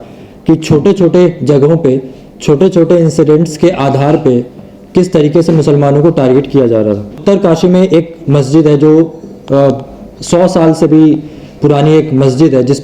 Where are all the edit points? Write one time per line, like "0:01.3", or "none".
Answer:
0:07.2